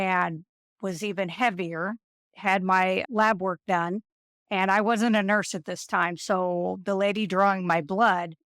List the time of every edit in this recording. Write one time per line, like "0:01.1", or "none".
0:03.0

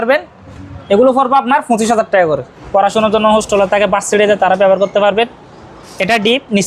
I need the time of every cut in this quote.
0:02.5

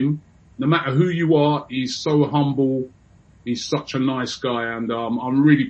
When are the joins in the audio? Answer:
none

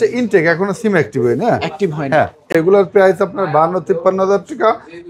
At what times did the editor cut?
0:02.5

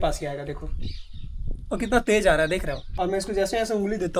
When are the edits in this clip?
0:02.8

